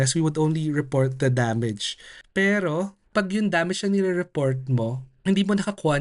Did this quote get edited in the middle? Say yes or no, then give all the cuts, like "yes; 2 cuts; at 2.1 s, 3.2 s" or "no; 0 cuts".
yes; 3 cuts; at 2.3 s, 3.1 s, 5.1 s